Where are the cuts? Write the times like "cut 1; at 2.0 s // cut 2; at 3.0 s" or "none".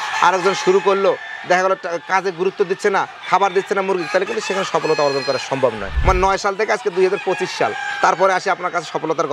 cut 1; at 5.9 s